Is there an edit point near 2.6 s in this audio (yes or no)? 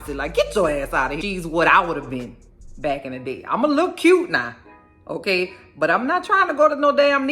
no